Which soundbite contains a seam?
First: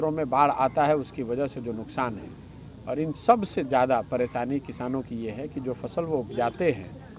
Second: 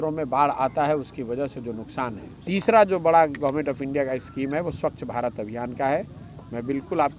second; 1 cut; at 2.3 s

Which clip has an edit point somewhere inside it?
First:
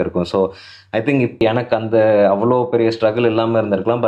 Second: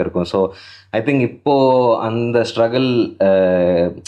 first; 1 cut; at 1.4 s

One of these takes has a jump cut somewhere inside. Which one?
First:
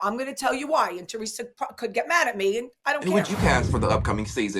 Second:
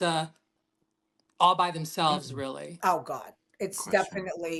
first; 1 cut; at 3.0 s

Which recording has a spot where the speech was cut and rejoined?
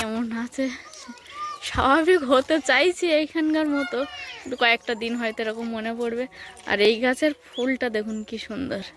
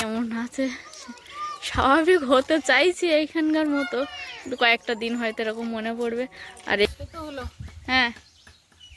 second; 1 cut; at 6.8 s

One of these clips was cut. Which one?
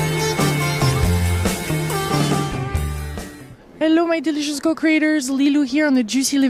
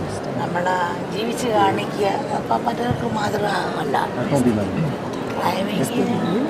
second; 1 cut; at 1.6 s

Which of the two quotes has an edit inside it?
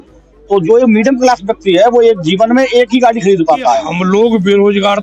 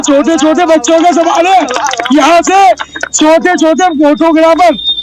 first; 1 cut; at 3.9 s

